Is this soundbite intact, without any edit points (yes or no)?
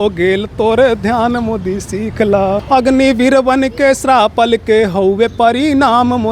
no